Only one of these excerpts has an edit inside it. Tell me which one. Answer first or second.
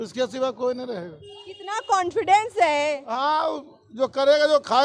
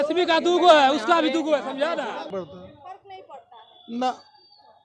second